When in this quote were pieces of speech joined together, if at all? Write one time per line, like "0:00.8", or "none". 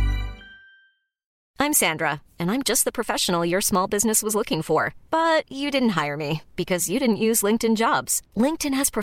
0:01.4